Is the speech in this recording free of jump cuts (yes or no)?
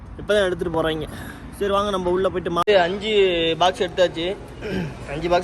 no